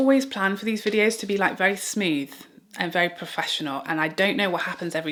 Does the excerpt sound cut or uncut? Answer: uncut